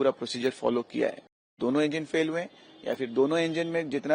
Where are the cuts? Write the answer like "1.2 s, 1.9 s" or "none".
1.5 s